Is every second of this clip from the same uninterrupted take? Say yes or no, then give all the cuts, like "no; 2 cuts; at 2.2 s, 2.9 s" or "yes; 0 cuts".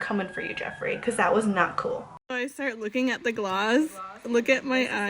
no; 1 cut; at 2.0 s